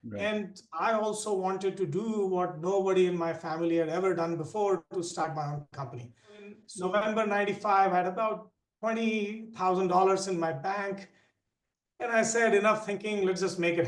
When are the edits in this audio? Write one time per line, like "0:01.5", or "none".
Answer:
0:06.6

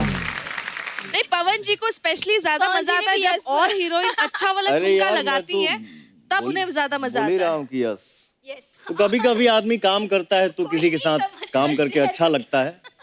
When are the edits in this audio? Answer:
0:01.0
0:08.7

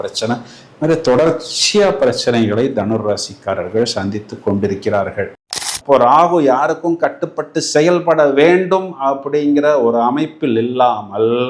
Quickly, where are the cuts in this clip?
0:05.3

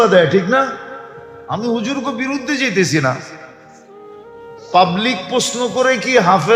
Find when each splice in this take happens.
none

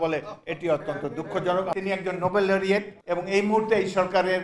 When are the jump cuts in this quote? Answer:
0:01.7
0:03.0

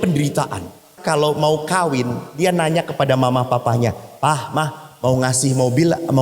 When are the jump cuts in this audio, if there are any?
0:01.0

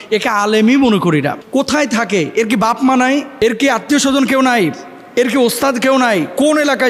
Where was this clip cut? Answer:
0:01.4

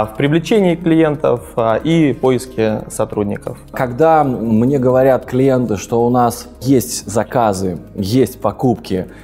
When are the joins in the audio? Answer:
0:03.7
0:06.6

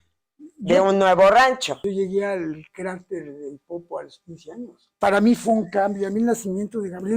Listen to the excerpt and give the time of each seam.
0:01.8
0:04.9

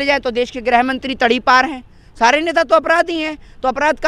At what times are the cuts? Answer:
none

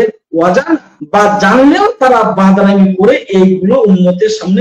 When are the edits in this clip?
0:00.9

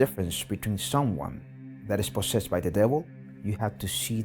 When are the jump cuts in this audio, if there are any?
0:03.2

